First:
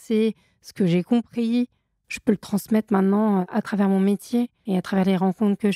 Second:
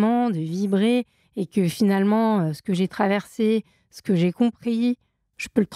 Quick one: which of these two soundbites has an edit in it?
first; 1 cut; at 4.6 s

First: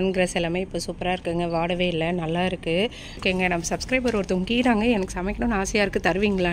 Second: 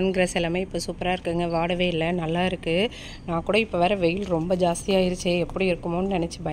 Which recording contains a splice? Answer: first; 1 cut; at 3.2 s

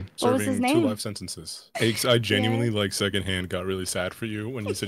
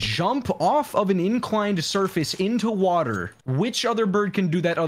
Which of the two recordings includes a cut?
first; 1 cut; at 1.6 s

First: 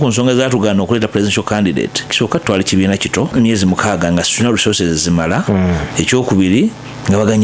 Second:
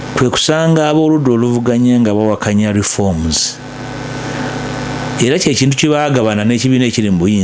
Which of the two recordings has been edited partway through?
first; 3 cuts; at 2.1 s, 3.3 s, 5.9 s

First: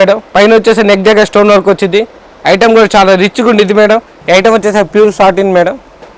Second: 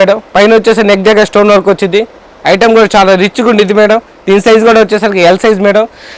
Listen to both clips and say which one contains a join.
first; 1 cut; at 4.1 s

